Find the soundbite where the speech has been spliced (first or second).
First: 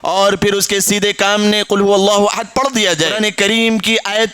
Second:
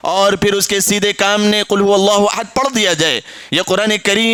first